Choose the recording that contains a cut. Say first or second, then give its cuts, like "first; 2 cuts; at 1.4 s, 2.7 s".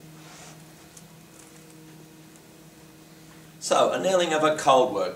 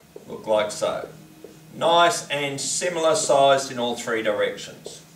first; 1 cut; at 3.5 s